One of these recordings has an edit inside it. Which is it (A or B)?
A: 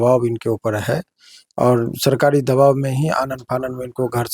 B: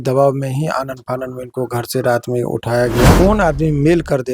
B